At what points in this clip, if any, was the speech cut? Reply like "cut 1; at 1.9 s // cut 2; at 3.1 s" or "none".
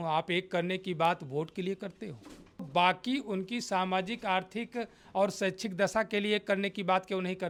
none